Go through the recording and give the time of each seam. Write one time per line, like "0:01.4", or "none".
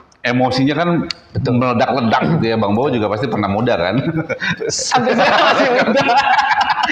none